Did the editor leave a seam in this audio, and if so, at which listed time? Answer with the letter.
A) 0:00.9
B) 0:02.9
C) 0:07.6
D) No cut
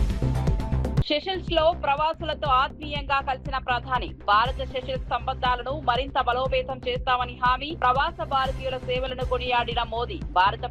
A